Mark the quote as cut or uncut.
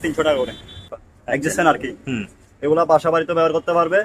cut